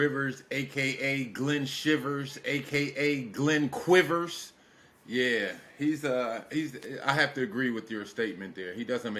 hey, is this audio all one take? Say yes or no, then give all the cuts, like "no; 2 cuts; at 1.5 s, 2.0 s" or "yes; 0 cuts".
yes; 0 cuts